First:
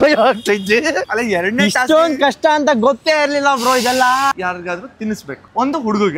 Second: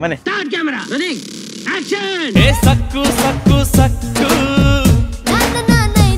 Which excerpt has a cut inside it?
first; 2 cuts; at 1.1 s, 4.3 s

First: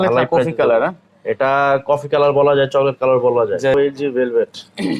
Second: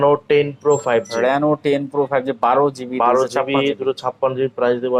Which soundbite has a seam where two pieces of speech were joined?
first; 1 cut; at 3.7 s

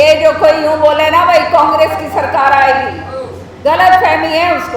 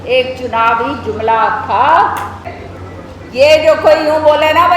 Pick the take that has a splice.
second; 1 cut; at 2.4 s

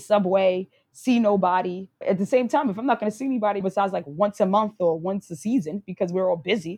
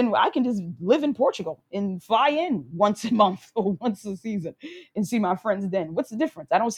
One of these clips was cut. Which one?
first; 2 cuts; at 1.9 s, 3.6 s

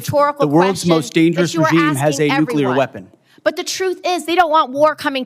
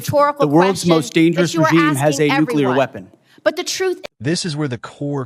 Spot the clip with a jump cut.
first; 1 cut; at 4.0 s

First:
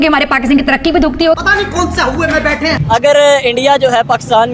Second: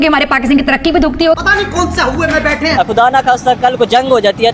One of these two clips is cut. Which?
second; 1 cut; at 2.7 s

